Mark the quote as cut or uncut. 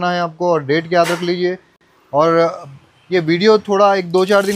uncut